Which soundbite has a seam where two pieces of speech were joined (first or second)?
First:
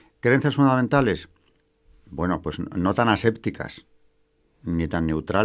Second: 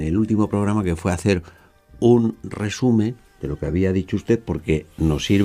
second